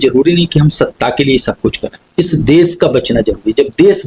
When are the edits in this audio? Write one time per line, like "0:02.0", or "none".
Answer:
none